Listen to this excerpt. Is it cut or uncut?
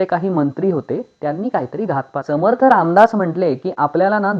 cut